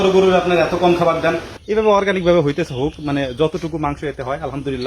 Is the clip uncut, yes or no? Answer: no